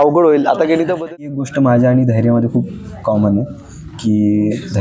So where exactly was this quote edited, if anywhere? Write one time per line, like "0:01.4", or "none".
0:01.1